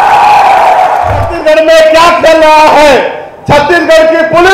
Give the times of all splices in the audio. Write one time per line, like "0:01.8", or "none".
0:01.3

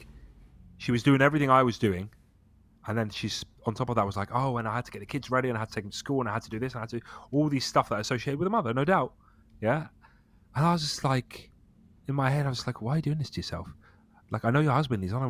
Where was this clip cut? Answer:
none

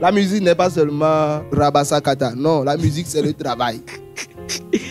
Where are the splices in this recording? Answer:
0:01.4

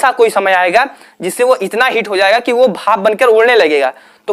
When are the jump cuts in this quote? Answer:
none

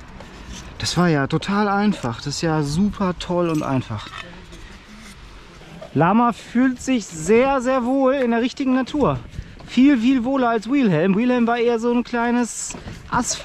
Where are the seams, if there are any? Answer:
0:05.9

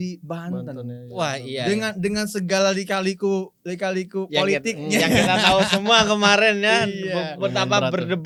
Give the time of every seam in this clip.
none

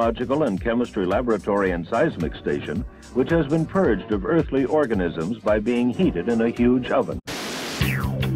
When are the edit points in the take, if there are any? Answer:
none

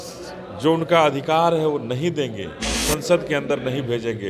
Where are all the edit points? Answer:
none

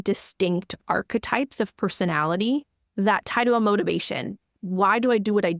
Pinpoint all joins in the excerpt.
0:04.5

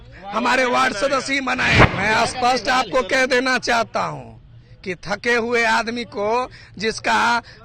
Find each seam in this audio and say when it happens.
0:01.9

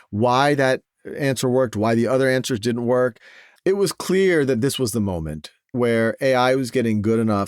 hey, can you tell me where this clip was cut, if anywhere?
0:03.5

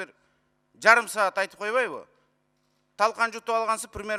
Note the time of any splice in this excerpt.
none

